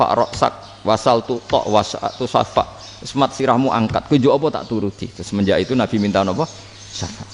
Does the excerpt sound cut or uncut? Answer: uncut